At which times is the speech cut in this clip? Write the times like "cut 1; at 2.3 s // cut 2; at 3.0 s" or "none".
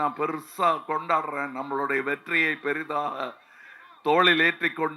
none

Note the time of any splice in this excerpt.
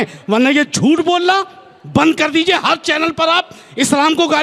none

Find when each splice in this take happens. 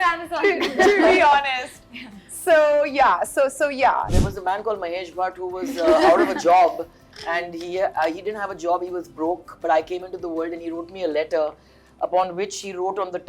cut 1; at 4.1 s

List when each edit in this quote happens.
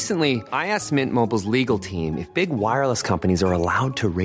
none

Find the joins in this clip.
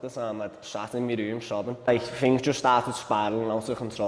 cut 1; at 1.9 s

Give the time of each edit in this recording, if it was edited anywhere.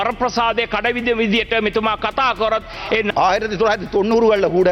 cut 1; at 3.1 s

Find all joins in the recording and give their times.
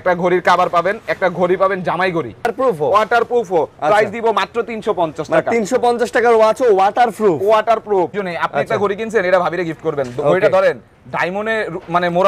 cut 1; at 2.5 s // cut 2; at 8.1 s

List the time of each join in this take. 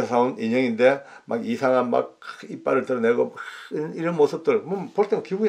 none

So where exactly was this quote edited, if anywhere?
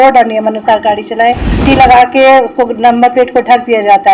cut 1; at 1.6 s

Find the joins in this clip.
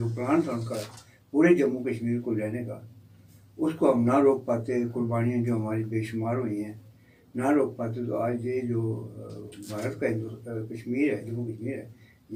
none

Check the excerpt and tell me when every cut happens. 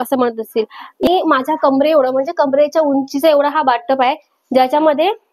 cut 1; at 1.1 s

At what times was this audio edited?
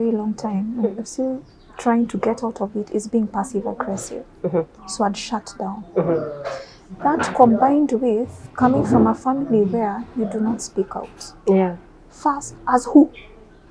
none

